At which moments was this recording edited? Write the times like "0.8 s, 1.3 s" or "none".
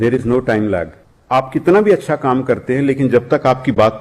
1.1 s